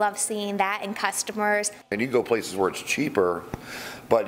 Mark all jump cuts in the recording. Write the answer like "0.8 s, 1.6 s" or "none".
1.9 s